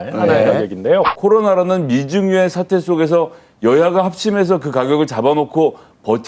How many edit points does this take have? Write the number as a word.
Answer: one